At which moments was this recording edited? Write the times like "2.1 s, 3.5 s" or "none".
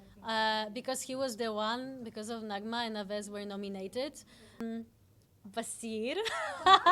4.6 s